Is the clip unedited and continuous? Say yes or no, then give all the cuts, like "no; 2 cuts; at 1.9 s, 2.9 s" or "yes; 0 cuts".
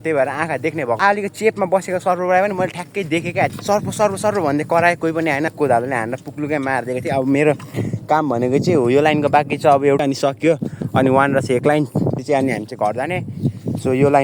no; 5 cuts; at 1.0 s, 3.5 s, 5.5 s, 10.0 s, 12.2 s